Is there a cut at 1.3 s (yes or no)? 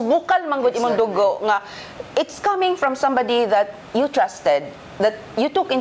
no